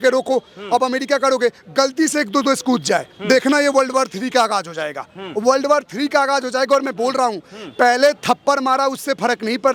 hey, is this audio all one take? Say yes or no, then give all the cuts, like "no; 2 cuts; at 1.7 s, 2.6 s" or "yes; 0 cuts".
yes; 0 cuts